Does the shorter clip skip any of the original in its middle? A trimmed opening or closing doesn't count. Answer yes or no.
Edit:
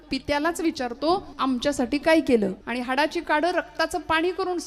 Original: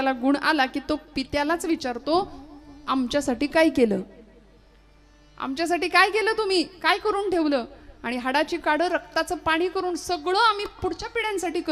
yes